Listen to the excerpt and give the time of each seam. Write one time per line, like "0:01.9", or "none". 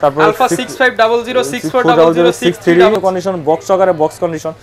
0:03.0